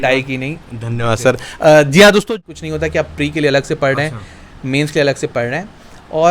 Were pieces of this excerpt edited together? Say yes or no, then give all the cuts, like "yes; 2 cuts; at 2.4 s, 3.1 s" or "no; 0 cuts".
yes; 1 cut; at 2.3 s